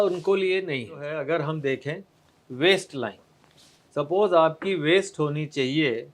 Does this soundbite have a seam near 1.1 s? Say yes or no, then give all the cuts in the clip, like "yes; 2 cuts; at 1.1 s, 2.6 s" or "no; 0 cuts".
yes; 1 cut; at 1.1 s